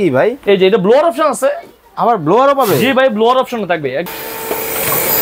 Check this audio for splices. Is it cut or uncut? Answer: cut